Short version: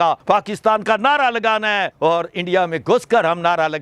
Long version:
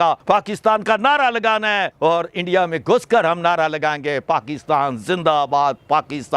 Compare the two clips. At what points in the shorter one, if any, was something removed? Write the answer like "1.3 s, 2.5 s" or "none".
none